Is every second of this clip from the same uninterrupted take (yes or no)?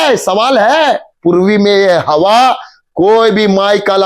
no